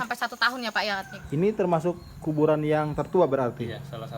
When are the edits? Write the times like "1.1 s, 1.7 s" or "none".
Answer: 1.1 s